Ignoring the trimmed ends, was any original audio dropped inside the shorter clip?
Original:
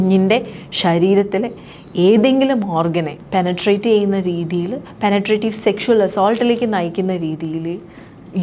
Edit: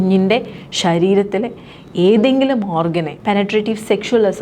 yes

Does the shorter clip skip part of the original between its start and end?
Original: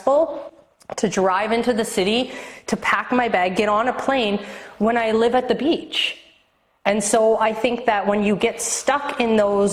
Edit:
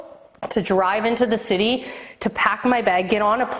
no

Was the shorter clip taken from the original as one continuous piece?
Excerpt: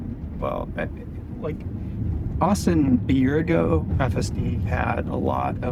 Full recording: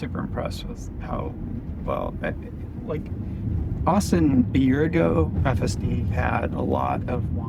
yes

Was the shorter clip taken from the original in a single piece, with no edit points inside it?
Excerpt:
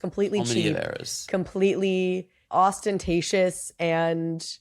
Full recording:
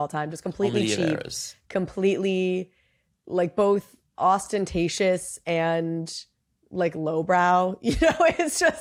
no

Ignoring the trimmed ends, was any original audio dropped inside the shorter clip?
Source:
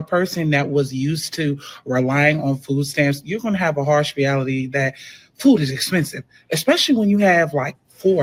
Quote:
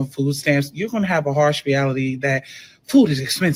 no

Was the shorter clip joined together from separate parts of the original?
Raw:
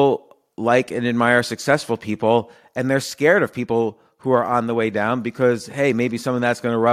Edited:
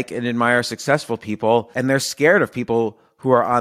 yes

